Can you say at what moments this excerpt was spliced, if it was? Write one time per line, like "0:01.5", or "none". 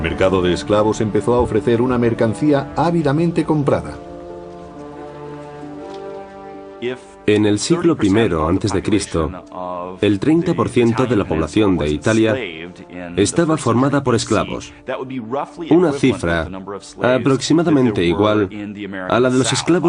0:13.8